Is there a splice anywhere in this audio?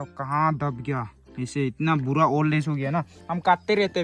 no; 0 cuts

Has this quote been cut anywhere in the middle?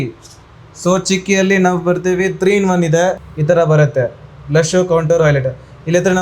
yes; 1 cut; at 3.2 s

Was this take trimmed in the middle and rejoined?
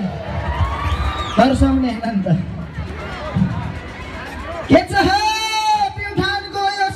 no; 0 cuts

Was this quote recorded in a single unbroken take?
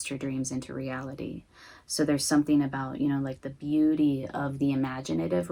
yes; 0 cuts

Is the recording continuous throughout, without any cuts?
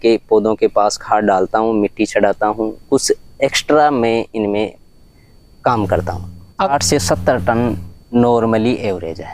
no; 1 cut; at 6.7 s

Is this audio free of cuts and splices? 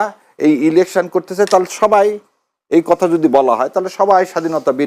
yes; 0 cuts

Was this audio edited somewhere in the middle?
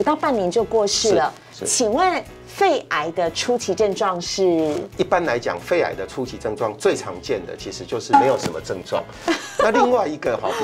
no; 0 cuts

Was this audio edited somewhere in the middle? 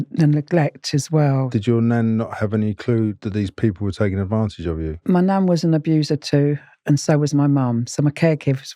yes; 2 cuts; at 1.5 s, 3.2 s

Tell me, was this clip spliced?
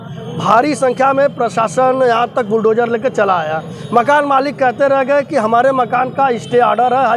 no; 0 cuts

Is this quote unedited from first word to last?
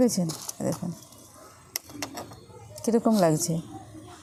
yes; 0 cuts

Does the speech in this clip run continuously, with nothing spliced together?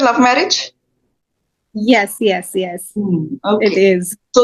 yes; 0 cuts

